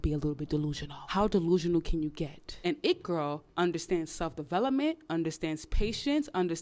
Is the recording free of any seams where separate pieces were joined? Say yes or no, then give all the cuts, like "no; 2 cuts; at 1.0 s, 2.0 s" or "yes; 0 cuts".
no; 2 cuts; at 0.9 s, 2.5 s